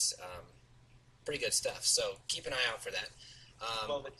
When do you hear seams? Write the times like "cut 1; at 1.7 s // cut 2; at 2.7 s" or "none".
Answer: cut 1; at 3.1 s